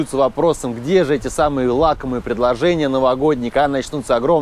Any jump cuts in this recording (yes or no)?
no